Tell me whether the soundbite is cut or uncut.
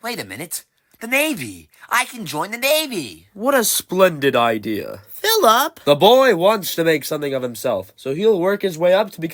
uncut